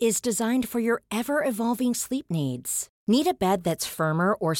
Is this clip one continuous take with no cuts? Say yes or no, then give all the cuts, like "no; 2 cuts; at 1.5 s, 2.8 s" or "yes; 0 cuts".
yes; 0 cuts